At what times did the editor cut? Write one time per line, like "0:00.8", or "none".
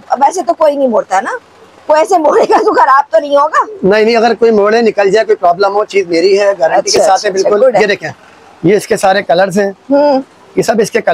none